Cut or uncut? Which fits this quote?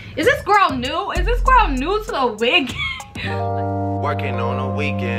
cut